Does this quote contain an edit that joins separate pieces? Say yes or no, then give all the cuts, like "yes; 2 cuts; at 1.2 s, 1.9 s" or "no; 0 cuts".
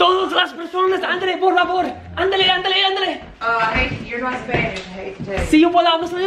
no; 0 cuts